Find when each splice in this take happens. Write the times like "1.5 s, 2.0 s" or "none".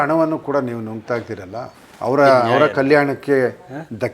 1.8 s